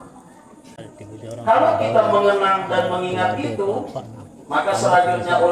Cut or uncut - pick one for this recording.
cut